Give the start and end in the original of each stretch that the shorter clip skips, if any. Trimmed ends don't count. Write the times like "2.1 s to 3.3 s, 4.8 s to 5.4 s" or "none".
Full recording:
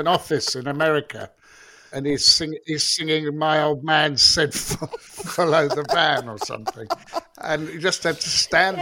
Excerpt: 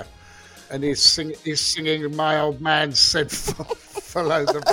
none